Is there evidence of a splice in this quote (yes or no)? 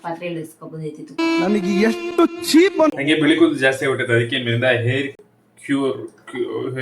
yes